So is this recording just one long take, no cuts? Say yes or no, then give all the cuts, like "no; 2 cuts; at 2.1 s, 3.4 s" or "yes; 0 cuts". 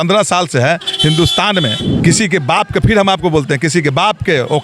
no; 1 cut; at 1.9 s